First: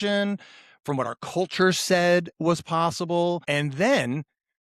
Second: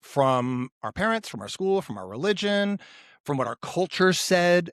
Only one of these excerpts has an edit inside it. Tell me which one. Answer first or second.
first